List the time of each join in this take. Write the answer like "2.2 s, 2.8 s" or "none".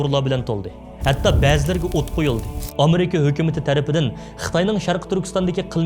2.6 s